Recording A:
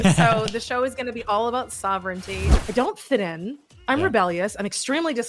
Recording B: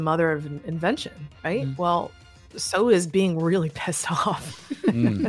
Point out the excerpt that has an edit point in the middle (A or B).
A